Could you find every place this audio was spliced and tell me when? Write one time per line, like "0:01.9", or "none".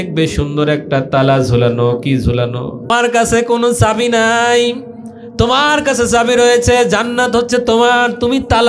0:02.9